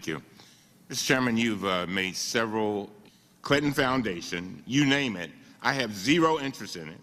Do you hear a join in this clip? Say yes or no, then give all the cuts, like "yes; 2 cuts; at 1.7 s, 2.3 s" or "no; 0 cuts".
no; 0 cuts